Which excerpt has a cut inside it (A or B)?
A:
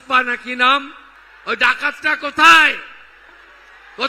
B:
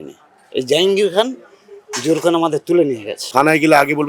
B